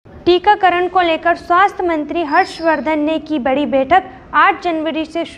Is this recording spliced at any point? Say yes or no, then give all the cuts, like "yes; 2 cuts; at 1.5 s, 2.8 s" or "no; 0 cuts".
no; 0 cuts